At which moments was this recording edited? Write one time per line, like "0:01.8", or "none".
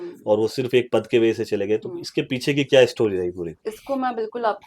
none